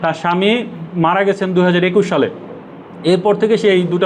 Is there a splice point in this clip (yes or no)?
no